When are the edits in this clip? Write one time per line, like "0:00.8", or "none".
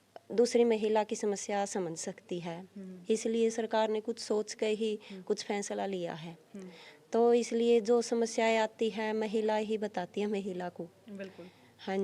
none